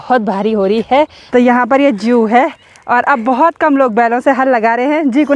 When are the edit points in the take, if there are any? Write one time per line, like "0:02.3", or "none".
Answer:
0:01.2